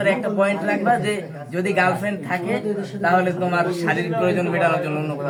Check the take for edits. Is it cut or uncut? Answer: uncut